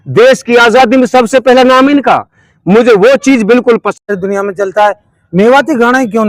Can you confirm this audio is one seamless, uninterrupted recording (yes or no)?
no